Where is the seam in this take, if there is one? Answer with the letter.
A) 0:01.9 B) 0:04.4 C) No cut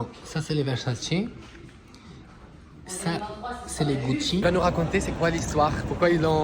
B